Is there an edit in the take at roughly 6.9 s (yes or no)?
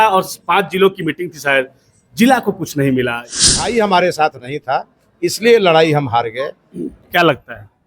yes